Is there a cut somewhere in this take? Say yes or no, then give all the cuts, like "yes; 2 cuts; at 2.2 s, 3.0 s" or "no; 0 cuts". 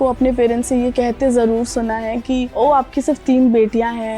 yes; 1 cut; at 2.5 s